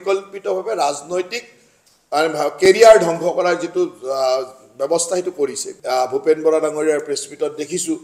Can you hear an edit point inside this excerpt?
yes; 1 cut; at 5.7 s

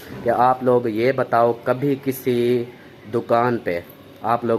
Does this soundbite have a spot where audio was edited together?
no; 0 cuts

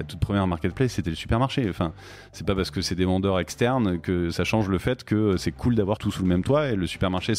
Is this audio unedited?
no; 1 cut; at 6.1 s

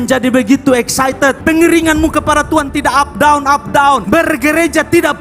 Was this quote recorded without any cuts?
no; 2 cuts; at 1.4 s, 4.0 s

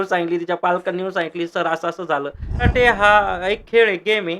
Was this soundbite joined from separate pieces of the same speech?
yes; 1 cut; at 2.7 s

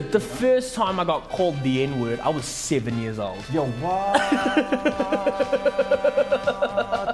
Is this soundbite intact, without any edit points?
yes; 0 cuts

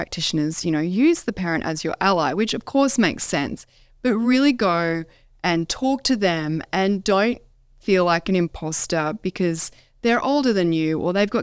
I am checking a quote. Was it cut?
no; 0 cuts

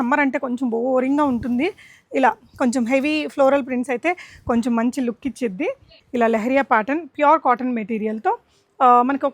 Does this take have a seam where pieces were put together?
yes; 1 cut; at 6.0 s

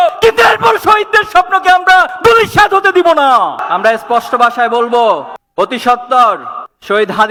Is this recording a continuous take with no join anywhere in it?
yes; 0 cuts

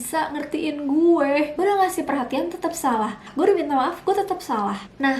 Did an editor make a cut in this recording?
yes; 2 cuts; at 1.6 s, 3.3 s

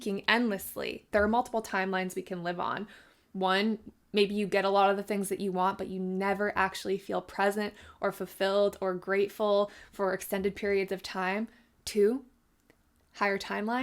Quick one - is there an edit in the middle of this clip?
yes; 1 cut; at 1.1 s

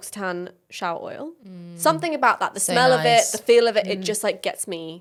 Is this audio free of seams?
yes; 0 cuts

